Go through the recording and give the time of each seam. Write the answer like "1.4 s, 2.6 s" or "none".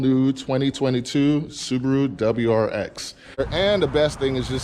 3.5 s